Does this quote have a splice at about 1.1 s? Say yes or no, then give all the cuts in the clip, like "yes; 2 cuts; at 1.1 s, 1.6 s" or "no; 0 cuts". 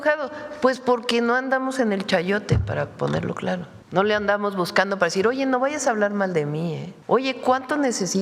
no; 2 cuts; at 3.8 s, 6.9 s